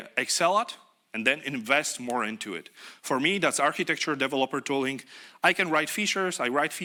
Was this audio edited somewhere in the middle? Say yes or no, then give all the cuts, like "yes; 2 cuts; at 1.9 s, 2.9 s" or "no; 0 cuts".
no; 0 cuts